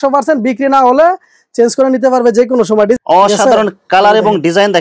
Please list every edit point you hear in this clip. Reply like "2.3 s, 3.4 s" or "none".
3.0 s